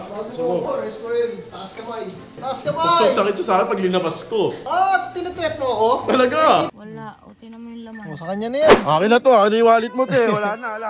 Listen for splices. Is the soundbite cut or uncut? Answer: cut